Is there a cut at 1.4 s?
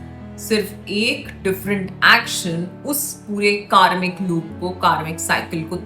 no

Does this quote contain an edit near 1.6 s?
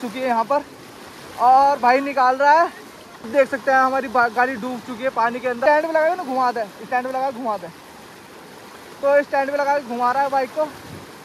no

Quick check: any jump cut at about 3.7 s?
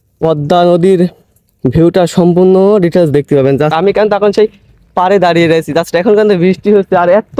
yes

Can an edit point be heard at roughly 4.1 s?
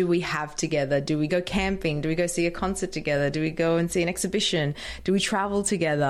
no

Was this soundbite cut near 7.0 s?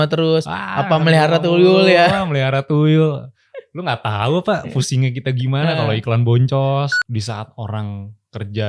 yes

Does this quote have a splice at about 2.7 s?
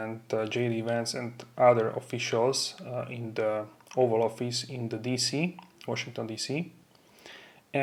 no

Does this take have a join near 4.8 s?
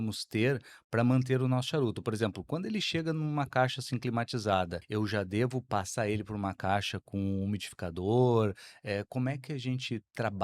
yes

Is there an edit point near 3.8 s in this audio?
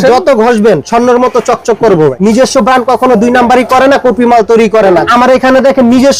no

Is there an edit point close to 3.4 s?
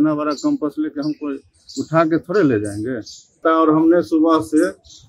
yes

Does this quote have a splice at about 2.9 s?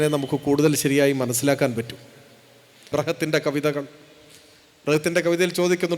yes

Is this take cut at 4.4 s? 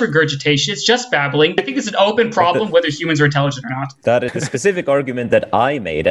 yes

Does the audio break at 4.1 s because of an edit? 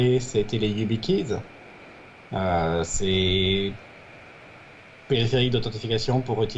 no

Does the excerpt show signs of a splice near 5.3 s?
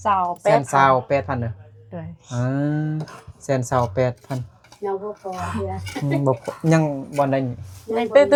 no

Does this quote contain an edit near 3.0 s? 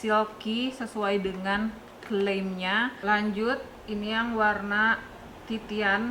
yes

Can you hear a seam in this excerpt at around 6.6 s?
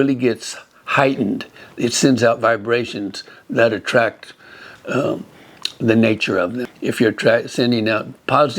yes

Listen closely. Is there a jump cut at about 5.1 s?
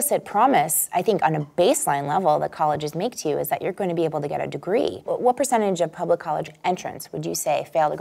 yes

